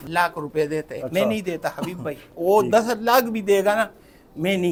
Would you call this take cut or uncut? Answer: uncut